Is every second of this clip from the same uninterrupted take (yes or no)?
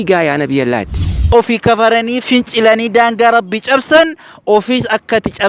no